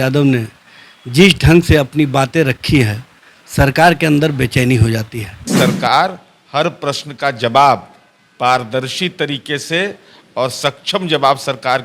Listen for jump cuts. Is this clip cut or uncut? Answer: cut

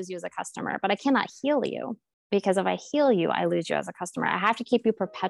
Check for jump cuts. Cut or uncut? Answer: uncut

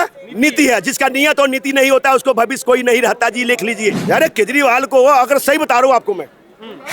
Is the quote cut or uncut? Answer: cut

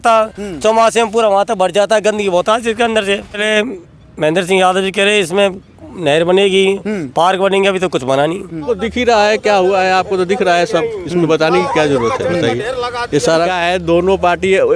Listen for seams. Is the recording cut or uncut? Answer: cut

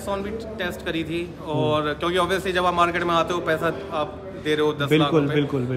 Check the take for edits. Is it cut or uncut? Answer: uncut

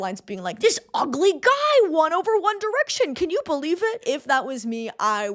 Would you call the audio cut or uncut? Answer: cut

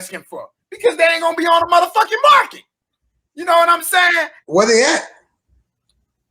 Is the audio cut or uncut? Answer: cut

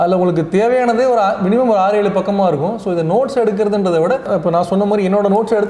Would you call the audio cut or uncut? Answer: cut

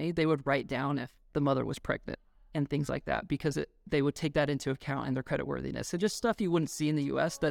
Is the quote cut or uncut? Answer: uncut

